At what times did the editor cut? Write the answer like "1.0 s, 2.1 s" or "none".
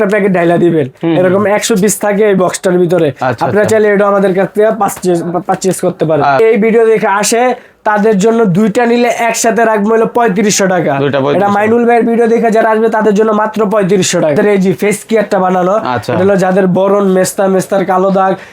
6.4 s, 14.4 s